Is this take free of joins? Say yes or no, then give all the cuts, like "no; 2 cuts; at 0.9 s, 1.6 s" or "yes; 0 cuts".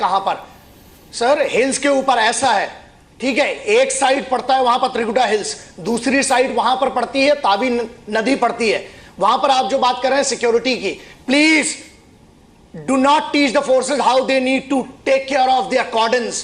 no; 1 cut; at 13.7 s